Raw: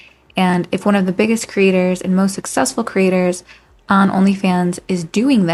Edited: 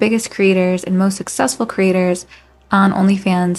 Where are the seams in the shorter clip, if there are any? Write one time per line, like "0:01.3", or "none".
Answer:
none

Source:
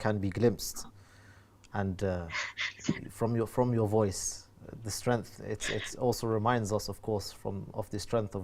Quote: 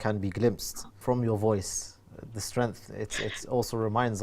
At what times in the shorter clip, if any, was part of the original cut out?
0:01.0

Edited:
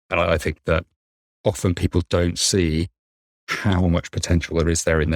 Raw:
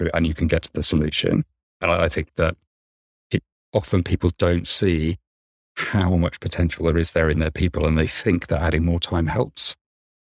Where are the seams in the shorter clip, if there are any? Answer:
0:01.3

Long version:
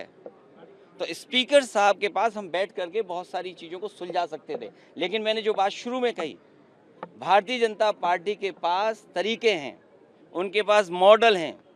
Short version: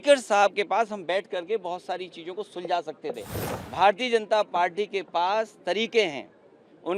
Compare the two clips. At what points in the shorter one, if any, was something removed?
0:03.3

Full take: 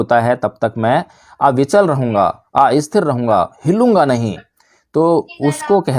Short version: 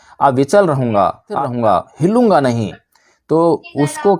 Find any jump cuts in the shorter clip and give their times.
0:01.4

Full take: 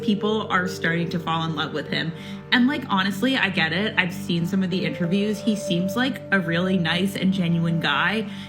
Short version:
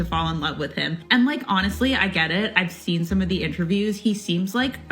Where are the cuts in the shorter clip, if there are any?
0:01.0

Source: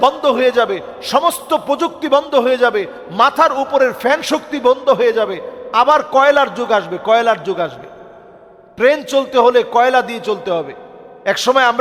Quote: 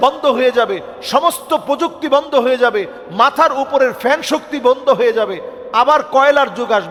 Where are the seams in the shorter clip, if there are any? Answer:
none

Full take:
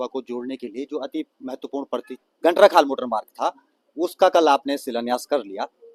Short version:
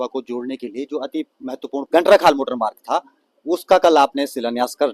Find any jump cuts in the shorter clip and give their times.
0:01.9

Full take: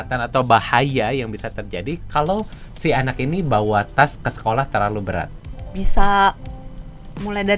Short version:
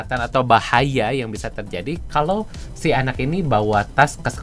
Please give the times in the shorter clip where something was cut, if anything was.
none

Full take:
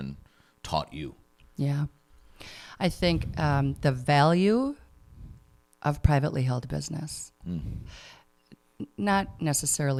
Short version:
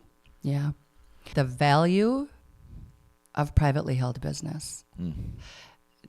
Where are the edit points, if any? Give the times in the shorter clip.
0:01.3

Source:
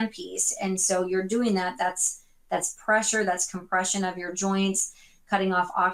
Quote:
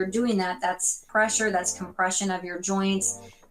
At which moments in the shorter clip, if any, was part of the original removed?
0:01.0

